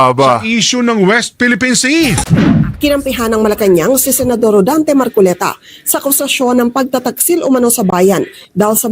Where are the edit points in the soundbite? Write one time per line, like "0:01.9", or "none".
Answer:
0:02.2